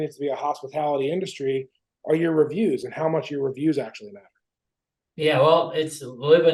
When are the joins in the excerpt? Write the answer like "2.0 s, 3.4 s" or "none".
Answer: none